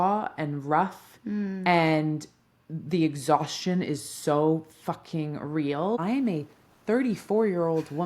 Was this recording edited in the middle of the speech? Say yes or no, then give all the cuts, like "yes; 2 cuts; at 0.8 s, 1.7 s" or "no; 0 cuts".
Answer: yes; 1 cut; at 6.0 s